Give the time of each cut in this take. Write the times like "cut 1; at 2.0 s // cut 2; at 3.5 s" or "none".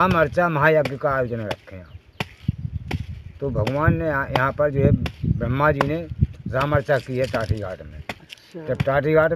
none